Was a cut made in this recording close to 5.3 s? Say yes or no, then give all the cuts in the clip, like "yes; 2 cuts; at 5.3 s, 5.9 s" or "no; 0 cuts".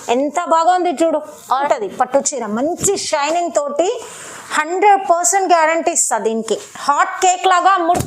no; 1 cut; at 1.5 s